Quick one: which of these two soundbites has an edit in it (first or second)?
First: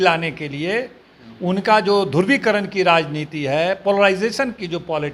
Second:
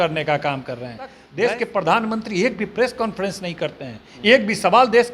second